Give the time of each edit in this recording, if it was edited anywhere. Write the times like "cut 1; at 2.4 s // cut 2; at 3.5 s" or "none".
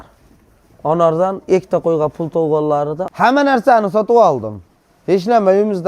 cut 1; at 3.0 s